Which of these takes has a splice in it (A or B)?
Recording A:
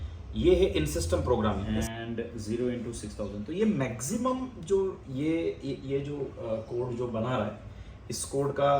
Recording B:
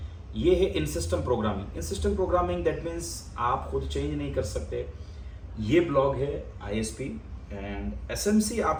A